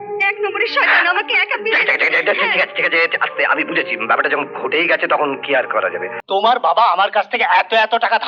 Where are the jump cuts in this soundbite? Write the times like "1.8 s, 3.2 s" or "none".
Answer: 6.1 s